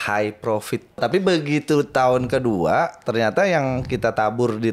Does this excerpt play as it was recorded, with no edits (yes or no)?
no